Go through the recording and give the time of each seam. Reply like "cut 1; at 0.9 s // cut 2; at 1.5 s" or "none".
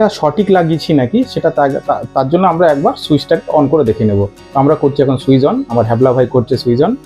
none